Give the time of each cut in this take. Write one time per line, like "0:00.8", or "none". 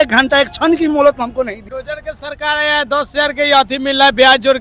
0:01.6